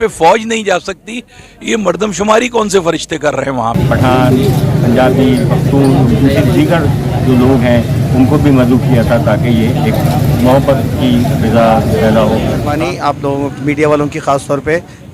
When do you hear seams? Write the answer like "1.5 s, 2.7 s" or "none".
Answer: 3.8 s, 12.7 s